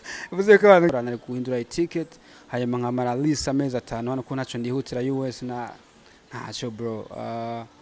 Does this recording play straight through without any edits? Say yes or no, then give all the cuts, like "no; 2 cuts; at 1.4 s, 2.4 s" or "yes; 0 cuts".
no; 1 cut; at 0.9 s